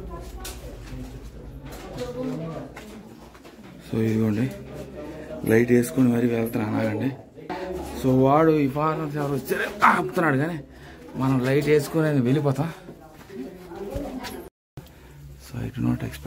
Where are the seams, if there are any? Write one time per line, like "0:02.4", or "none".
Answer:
0:14.9